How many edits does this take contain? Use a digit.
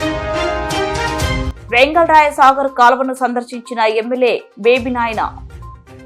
1